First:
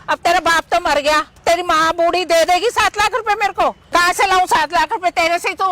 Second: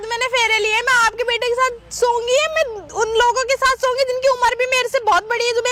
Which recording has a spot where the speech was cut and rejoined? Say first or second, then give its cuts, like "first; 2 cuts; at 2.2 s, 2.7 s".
first; 2 cuts; at 1.3 s, 3.8 s